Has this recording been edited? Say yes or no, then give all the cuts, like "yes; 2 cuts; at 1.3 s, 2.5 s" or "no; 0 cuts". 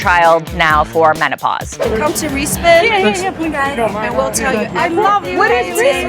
yes; 1 cut; at 1.8 s